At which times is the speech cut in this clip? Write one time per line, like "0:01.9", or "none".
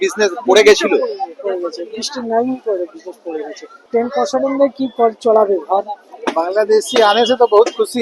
0:06.0

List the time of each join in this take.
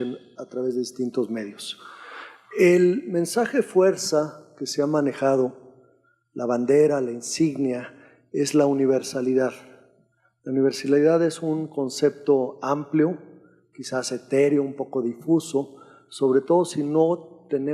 0:10.7

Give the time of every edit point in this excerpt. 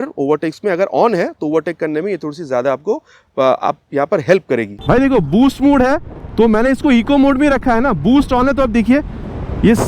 0:04.7

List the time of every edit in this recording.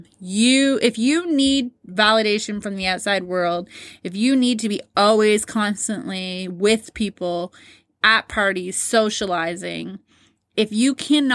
0:07.9

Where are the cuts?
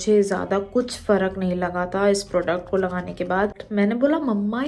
0:03.6

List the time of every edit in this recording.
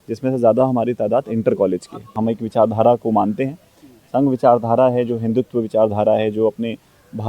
0:02.0

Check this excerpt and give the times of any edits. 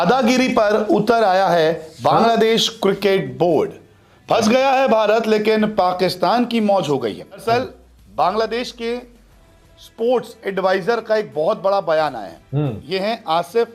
0:07.4

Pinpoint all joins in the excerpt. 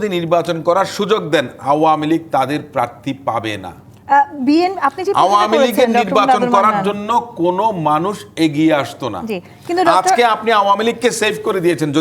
none

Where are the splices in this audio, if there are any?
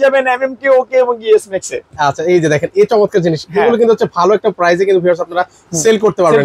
none

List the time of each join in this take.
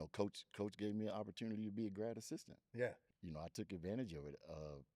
0:03.1

